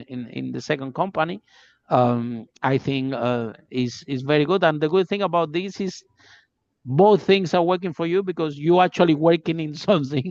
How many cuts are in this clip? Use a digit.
0